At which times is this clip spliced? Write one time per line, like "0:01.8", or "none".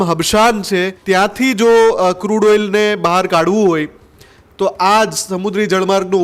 0:00.9